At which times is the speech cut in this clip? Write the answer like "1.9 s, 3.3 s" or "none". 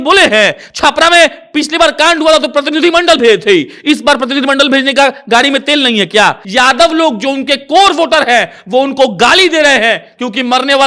6.4 s